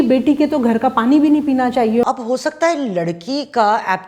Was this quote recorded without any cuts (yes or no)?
no